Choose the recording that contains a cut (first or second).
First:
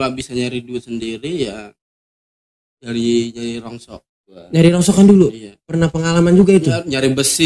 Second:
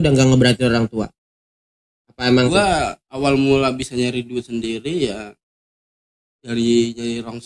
second